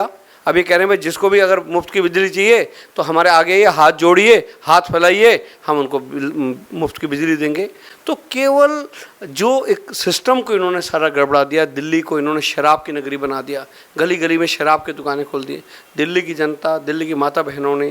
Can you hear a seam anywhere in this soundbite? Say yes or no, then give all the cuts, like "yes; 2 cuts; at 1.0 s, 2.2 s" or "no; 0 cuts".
no; 0 cuts